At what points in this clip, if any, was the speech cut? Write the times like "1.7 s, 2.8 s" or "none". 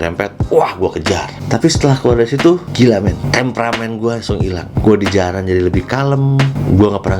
1.3 s, 3.2 s